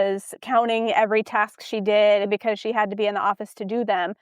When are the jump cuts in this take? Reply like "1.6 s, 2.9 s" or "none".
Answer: 2.3 s